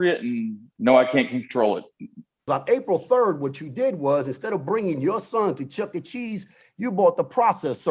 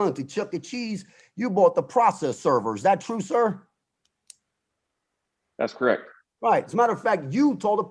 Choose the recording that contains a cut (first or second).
first